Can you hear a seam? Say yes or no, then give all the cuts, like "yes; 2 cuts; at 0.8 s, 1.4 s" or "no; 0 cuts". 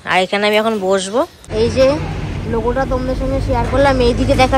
yes; 1 cut; at 1.4 s